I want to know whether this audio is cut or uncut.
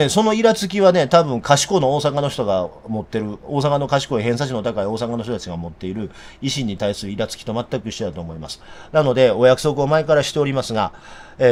uncut